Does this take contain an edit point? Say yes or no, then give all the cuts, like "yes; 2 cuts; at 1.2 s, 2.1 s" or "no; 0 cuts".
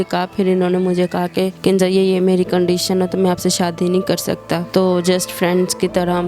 no; 0 cuts